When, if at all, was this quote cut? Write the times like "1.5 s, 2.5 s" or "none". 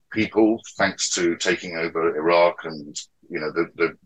none